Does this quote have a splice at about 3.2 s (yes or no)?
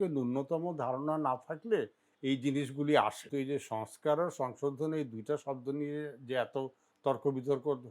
yes